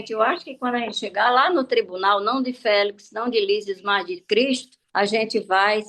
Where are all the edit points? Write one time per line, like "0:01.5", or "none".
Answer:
0:04.8